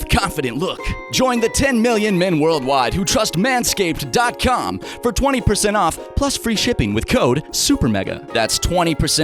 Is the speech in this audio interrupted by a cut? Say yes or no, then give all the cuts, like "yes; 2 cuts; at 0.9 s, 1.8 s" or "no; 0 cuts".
yes; 1 cut; at 0.9 s